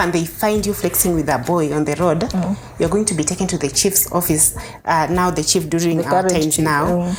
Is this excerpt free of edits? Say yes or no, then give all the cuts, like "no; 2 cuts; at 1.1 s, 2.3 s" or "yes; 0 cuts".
yes; 0 cuts